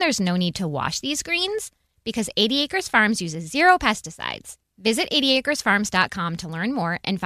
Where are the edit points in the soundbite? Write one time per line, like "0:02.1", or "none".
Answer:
none